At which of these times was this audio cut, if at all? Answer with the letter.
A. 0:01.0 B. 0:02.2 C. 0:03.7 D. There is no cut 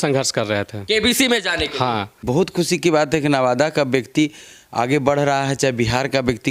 B